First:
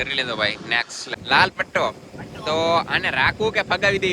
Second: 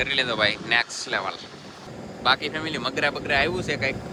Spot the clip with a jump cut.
first; 1 cut; at 1.1 s

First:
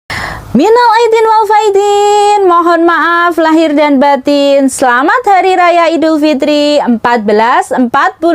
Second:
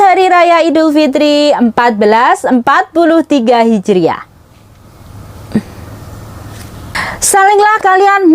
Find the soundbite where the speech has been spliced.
second; 1 cut; at 6.2 s

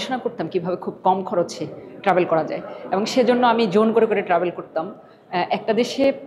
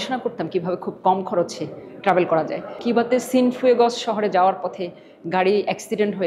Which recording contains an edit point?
second; 1 cut; at 2.7 s

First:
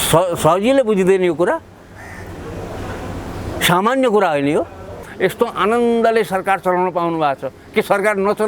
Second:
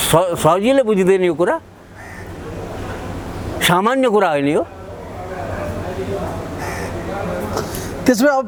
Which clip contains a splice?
first; 1 cut; at 5.0 s

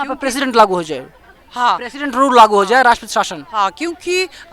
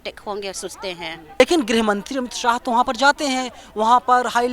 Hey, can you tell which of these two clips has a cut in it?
second; 1 cut; at 1.4 s

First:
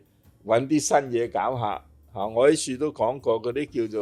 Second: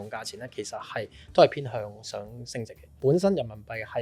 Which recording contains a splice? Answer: second; 1 cut; at 2.8 s

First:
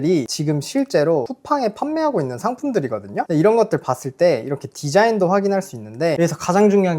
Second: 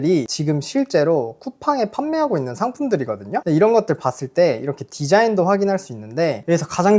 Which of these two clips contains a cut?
first; 2 cuts; at 1.4 s, 6.1 s

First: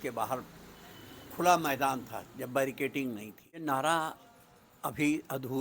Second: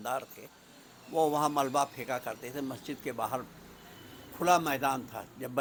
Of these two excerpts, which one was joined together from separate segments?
first; 1 cut; at 3.6 s

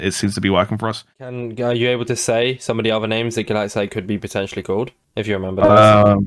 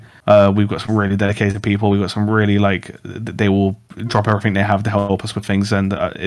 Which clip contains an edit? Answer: first; 1 cut; at 1.1 s

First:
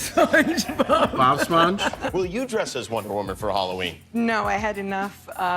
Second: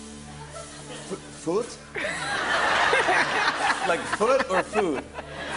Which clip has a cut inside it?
first; 1 cut; at 2.0 s

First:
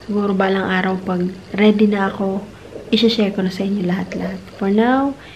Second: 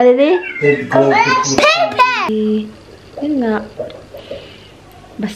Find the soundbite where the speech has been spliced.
second; 1 cut; at 2.3 s

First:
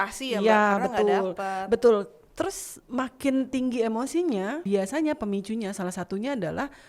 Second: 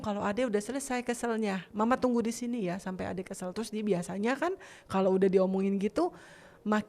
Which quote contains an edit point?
first; 1 cut; at 4.6 s

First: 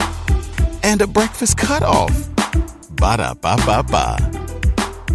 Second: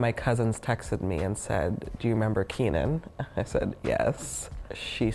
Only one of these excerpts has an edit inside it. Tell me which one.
second; 1 cut; at 4.2 s

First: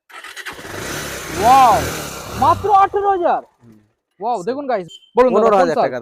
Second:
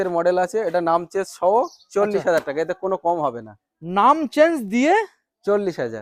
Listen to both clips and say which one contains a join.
first; 1 cut; at 4.9 s

